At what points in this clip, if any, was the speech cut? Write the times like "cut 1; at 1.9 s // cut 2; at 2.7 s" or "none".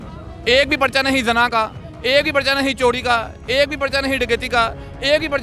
none